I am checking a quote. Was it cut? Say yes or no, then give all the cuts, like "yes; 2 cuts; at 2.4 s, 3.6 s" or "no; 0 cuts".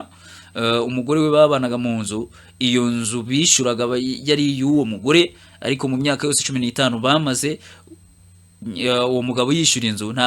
no; 0 cuts